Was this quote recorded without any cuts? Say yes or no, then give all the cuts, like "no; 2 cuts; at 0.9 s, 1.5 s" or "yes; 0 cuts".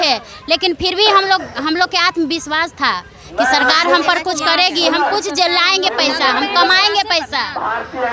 yes; 0 cuts